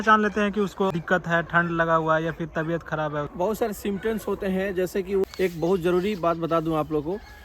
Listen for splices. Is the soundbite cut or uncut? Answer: cut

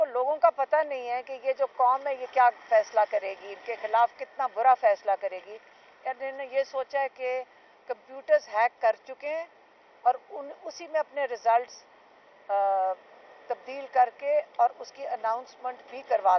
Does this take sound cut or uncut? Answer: uncut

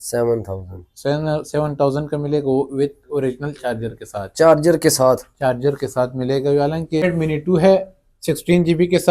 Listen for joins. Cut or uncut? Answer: cut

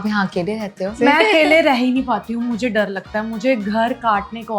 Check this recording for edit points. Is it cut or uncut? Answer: cut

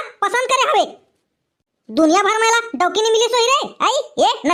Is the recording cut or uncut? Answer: uncut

